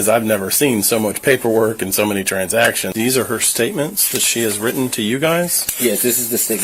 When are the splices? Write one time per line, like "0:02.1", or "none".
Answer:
0:02.8